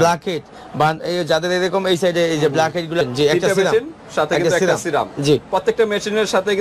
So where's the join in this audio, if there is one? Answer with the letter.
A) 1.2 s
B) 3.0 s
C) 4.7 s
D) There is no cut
B